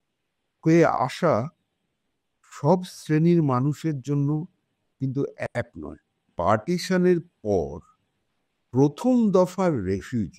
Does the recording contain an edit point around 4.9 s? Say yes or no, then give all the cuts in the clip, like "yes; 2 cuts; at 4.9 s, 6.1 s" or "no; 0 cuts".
no; 1 cut; at 6.3 s